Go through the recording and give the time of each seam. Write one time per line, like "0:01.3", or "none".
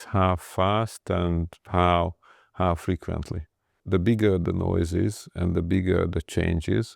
0:03.8